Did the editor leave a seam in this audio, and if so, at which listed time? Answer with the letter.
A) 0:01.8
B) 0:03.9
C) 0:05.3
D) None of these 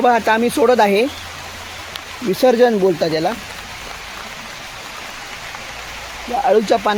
D